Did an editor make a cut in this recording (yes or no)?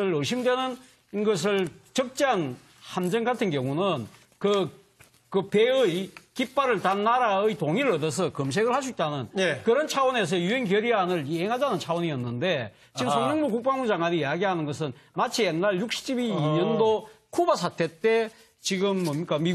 yes